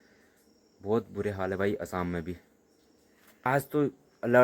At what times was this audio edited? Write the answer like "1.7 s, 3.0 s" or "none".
3.4 s